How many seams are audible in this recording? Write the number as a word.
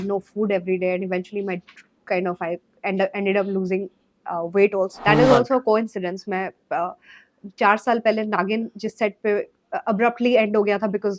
one